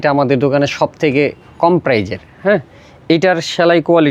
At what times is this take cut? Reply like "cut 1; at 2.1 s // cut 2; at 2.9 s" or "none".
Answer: none